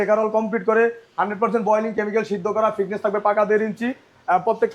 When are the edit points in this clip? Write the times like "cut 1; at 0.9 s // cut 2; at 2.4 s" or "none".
none